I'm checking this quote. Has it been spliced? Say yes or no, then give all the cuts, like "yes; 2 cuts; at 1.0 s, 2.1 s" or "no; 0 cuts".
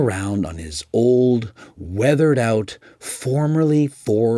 no; 0 cuts